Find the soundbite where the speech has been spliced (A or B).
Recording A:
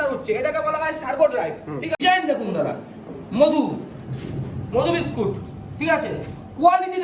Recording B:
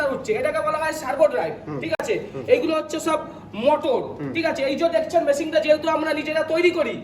A